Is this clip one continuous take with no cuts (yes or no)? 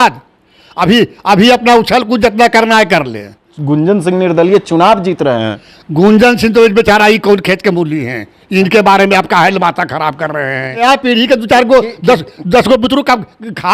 no